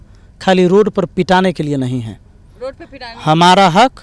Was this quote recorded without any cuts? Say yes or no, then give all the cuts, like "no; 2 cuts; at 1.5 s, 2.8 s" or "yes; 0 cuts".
yes; 0 cuts